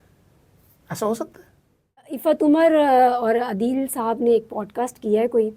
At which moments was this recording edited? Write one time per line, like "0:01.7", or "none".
0:02.1